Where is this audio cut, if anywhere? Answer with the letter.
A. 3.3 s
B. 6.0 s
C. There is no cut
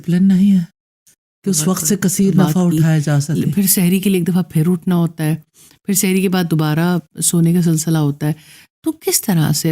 A